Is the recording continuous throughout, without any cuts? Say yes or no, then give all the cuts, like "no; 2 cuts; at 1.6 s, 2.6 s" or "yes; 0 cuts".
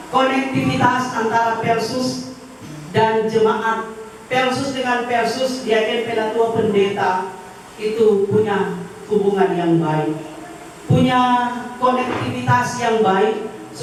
yes; 0 cuts